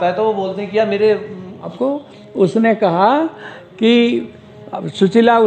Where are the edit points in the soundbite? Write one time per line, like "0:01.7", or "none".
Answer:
0:01.7